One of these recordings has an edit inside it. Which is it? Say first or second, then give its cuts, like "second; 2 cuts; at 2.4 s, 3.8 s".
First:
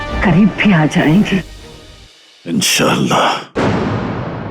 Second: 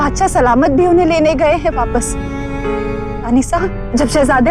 first; 1 cut; at 3.6 s